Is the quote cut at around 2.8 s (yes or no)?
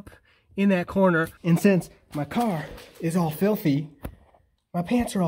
no